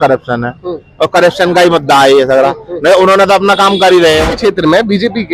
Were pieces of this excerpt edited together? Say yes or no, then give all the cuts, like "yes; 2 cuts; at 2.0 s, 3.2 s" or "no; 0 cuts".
yes; 1 cut; at 4.3 s